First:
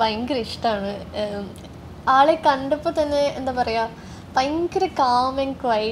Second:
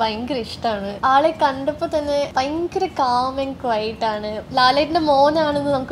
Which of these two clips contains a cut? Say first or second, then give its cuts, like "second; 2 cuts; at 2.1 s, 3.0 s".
second; 3 cuts; at 0.9 s, 2.3 s, 4.4 s